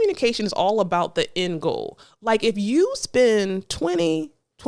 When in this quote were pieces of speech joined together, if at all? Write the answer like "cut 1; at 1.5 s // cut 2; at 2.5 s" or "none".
none

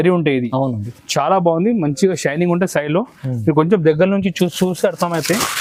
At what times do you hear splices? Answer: none

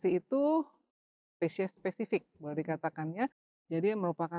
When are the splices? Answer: none

